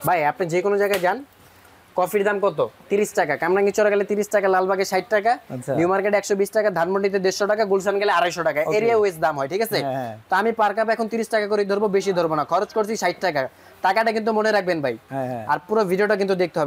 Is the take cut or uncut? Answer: uncut